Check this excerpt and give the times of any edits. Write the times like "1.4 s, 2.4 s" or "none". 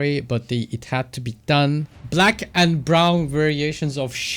2.0 s